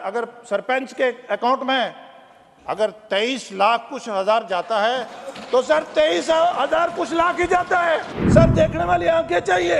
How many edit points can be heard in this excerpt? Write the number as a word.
one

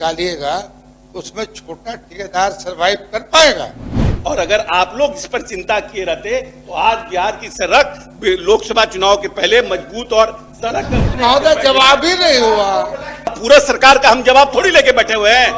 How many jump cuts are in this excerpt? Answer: three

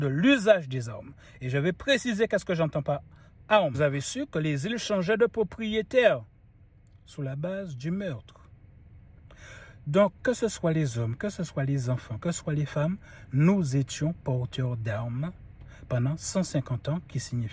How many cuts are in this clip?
one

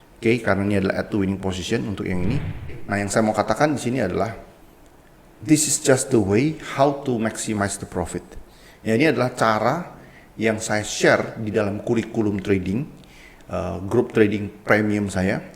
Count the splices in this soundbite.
one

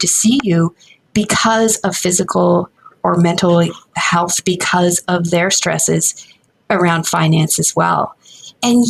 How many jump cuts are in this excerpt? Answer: one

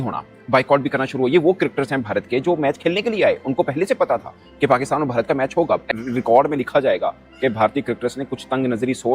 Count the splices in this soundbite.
one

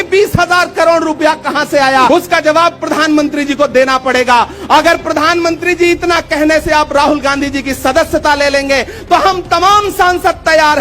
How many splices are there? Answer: one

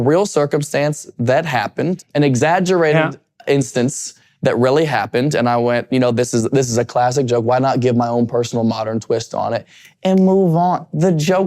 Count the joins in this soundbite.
one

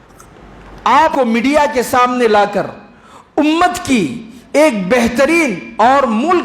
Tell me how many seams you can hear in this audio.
one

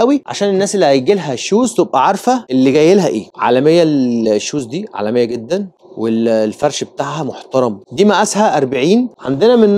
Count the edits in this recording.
two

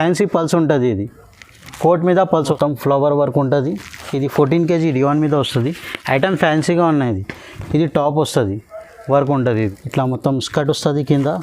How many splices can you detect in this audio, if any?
two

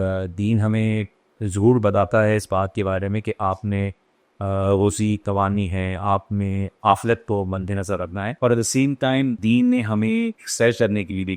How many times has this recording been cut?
three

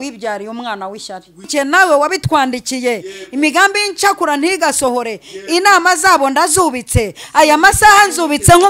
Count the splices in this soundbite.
one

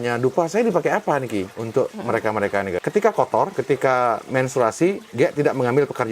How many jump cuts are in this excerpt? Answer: three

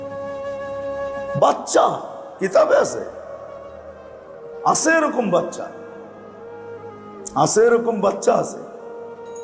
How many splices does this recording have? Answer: one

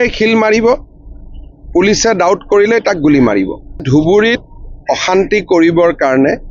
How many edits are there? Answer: one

